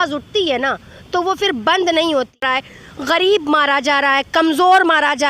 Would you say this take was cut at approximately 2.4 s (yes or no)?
yes